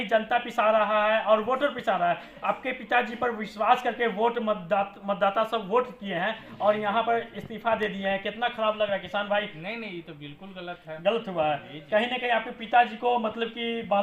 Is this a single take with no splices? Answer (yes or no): yes